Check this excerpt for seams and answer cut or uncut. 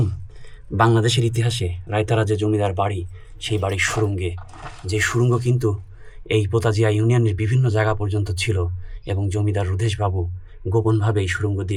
uncut